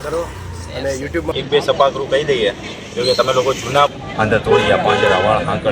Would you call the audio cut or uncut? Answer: cut